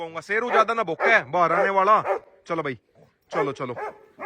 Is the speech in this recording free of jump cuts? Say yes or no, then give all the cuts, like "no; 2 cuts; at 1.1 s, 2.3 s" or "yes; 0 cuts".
yes; 0 cuts